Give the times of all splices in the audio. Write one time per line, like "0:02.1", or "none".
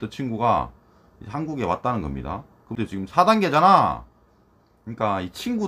0:02.7